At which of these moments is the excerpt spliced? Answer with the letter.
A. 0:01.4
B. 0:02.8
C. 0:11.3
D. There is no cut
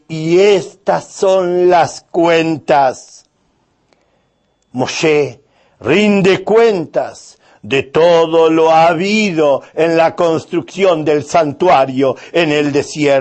D